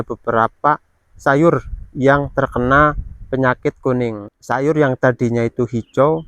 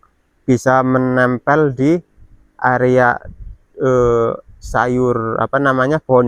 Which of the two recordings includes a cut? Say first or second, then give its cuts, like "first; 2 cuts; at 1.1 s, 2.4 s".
first; 1 cut; at 4.2 s